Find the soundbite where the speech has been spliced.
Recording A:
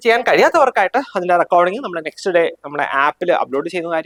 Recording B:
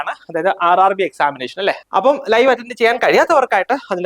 B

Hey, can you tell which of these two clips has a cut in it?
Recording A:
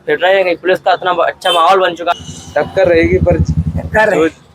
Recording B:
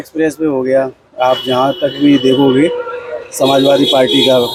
A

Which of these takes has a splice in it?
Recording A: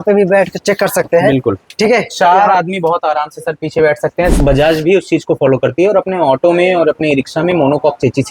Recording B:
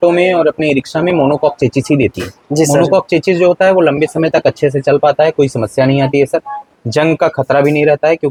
A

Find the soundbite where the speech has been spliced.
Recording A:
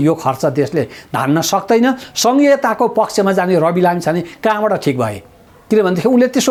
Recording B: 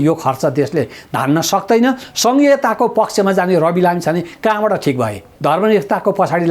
B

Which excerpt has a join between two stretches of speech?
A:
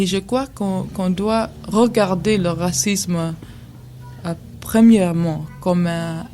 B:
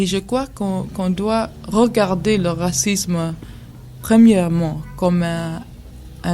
B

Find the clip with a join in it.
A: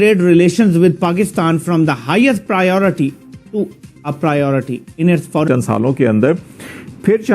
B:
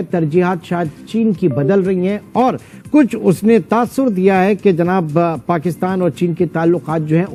A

